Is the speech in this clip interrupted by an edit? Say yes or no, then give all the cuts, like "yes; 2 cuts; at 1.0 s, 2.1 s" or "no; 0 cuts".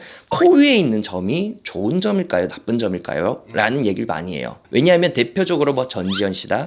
no; 0 cuts